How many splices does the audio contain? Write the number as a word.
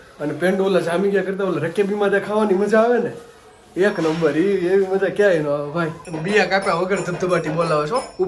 one